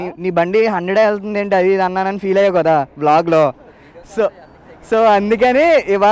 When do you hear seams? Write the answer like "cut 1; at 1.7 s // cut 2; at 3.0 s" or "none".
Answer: none